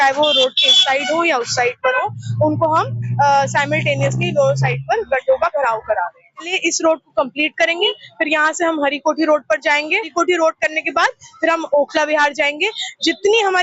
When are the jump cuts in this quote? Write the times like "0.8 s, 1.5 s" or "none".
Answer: 6.5 s, 10.1 s